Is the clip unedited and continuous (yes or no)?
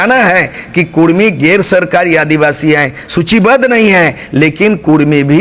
yes